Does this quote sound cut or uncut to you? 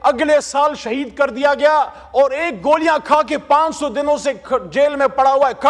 uncut